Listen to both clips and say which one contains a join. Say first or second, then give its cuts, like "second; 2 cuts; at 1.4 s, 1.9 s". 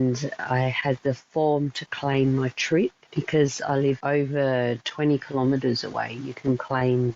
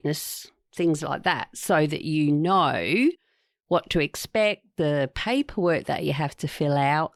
first; 2 cuts; at 3.1 s, 4.0 s